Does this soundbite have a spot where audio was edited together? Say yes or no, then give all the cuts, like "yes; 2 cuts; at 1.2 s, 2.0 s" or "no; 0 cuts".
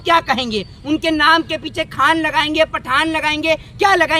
no; 0 cuts